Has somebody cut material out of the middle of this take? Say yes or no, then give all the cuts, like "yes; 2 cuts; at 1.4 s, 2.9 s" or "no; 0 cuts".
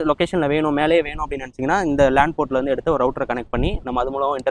no; 0 cuts